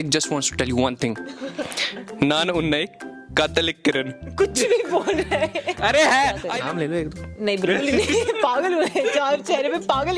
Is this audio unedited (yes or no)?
no